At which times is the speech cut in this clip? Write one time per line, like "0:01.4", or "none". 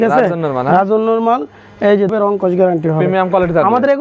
0:02.1